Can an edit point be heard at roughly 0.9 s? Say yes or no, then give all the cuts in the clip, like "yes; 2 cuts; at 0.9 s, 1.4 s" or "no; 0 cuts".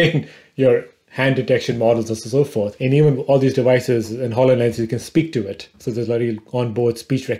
no; 1 cut; at 2.8 s